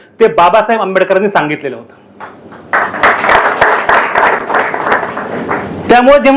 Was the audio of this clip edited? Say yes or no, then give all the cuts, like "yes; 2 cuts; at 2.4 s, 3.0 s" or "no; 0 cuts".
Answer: no; 0 cuts